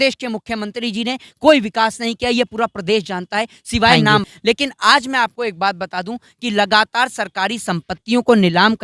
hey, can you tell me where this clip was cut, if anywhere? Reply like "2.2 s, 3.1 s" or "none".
4.2 s